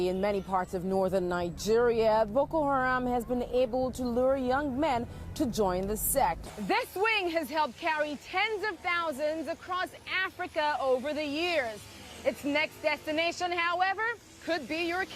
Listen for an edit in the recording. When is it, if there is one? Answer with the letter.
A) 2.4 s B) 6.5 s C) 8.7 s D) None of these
B